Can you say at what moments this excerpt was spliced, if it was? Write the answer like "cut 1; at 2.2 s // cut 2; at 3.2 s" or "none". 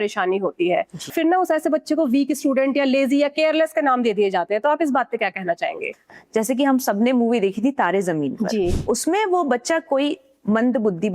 cut 1; at 1.1 s // cut 2; at 6.1 s // cut 3; at 8.8 s